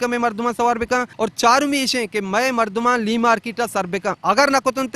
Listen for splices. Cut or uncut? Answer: cut